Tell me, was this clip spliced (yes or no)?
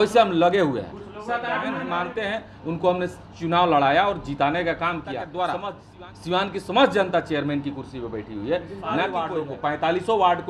yes